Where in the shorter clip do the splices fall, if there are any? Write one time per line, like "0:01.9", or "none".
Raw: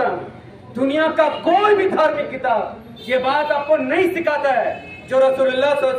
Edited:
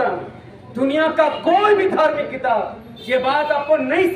none